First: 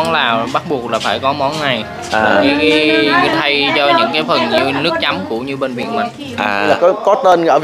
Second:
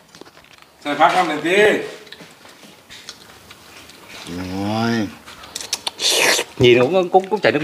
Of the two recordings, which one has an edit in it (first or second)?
first